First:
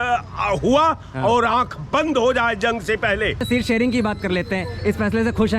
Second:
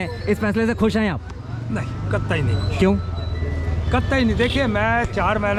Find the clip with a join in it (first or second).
first